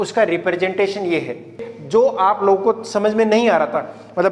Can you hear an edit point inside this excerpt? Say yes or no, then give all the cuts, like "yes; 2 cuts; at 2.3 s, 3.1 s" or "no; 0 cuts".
yes; 1 cut; at 1.7 s